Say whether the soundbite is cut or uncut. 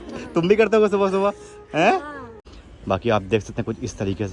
cut